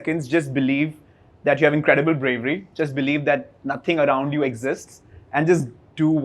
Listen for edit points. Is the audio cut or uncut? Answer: uncut